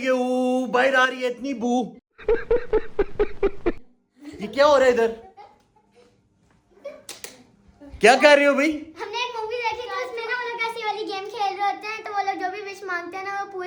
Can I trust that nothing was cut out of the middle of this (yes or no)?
yes